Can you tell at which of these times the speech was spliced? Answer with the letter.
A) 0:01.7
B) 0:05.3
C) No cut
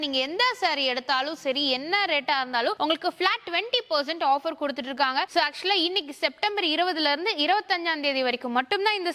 C